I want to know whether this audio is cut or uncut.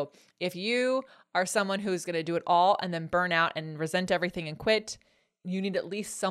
cut